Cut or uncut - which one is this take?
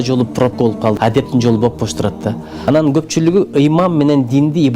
cut